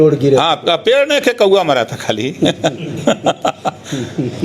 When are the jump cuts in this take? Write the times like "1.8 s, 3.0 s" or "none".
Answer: none